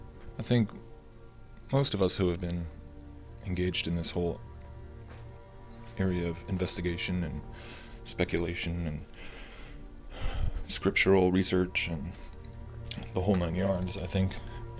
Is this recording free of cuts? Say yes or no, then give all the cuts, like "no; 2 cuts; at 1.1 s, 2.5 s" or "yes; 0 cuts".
no; 1 cut; at 8.8 s